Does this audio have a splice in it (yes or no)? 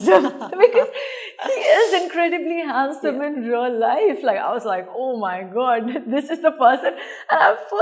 no